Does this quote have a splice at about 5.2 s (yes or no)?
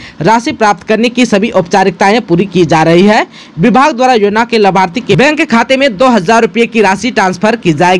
yes